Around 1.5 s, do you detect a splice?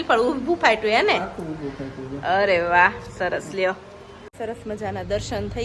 no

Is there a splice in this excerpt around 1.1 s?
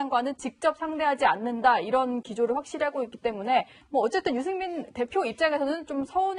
no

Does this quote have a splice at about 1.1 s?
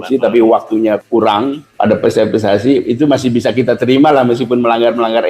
yes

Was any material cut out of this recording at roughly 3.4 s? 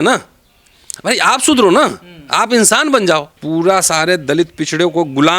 yes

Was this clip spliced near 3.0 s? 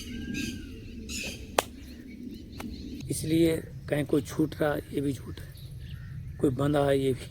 yes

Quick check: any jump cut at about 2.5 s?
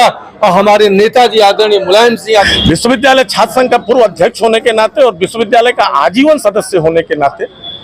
yes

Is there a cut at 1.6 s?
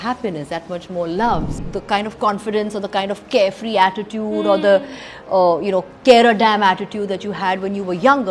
yes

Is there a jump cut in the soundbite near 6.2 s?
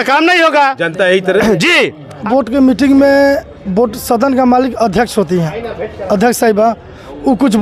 no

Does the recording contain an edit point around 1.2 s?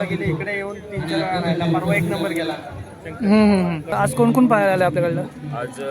no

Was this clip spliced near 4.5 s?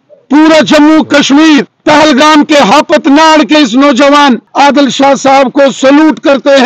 yes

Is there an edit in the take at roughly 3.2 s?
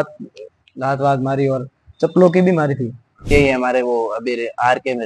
yes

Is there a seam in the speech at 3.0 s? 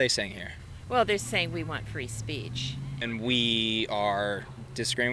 yes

